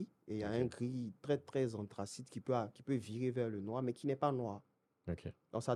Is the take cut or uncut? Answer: uncut